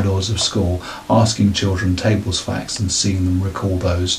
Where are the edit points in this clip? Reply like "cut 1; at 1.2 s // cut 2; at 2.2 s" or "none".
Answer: none